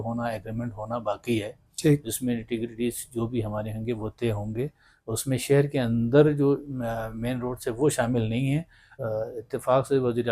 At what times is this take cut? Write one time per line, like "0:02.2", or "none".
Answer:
0:09.0